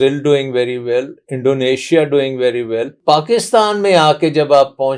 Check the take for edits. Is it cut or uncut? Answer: cut